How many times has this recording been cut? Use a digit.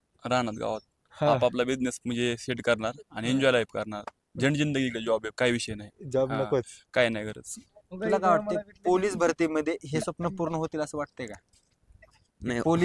1